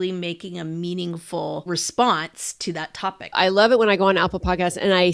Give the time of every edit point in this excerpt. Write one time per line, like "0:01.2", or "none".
0:01.6
0:03.4